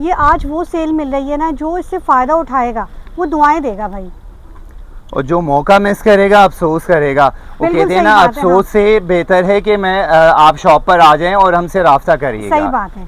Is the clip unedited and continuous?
yes; 0 cuts

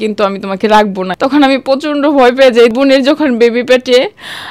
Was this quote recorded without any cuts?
no; 2 cuts; at 1.1 s, 2.7 s

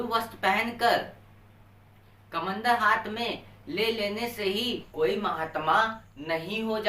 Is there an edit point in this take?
yes; 1 cut; at 4.9 s

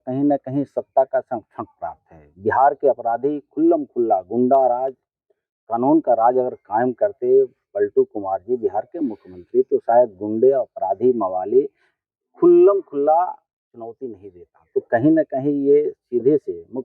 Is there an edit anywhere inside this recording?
no; 0 cuts

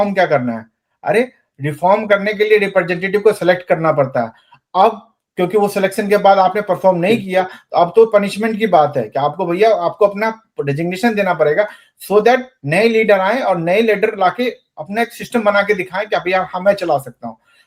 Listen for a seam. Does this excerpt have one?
no; 0 cuts

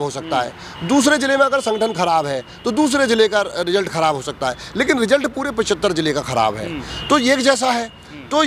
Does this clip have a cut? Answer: no; 0 cuts

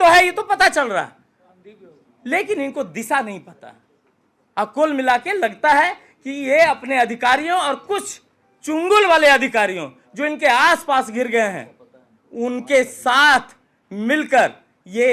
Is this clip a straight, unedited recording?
yes; 0 cuts

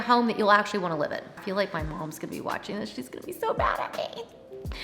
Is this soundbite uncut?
no; 1 cut; at 1.4 s

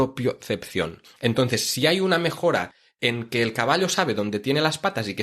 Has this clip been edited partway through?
yes; 1 cut; at 1.0 s

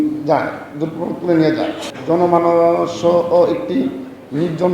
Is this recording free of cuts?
no; 1 cut; at 1.9 s

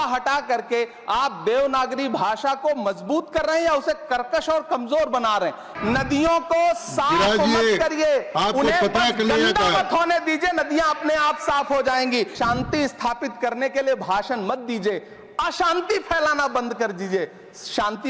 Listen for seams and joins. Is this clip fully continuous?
no; 2 cuts; at 5.7 s, 12.3 s

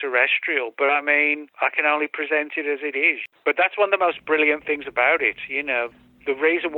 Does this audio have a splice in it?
yes; 2 cuts; at 1.5 s, 3.2 s

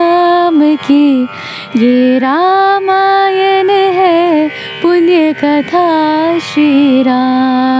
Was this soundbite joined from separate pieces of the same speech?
no; 0 cuts

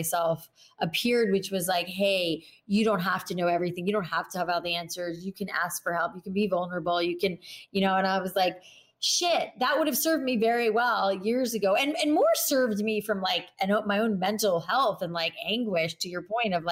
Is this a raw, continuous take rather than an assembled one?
yes; 0 cuts

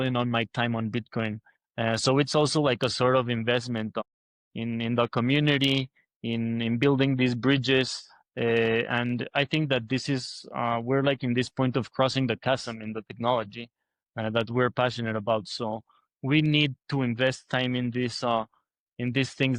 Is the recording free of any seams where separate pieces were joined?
yes; 0 cuts

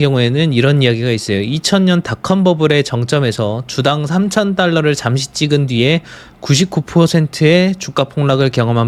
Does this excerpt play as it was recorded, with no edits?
yes; 0 cuts

